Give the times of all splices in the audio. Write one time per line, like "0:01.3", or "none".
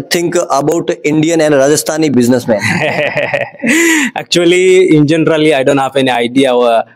none